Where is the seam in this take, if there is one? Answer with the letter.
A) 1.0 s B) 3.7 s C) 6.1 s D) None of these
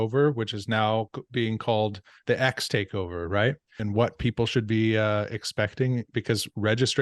B